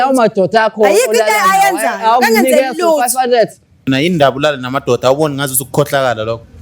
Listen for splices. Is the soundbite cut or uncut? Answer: cut